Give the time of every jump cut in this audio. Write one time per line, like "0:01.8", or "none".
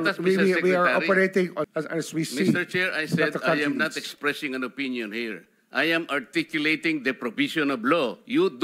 0:01.7